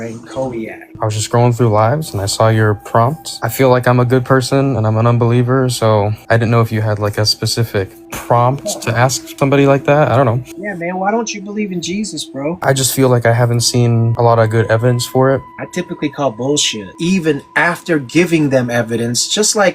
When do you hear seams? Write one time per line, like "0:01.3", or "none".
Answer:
0:00.9
0:03.4
0:16.8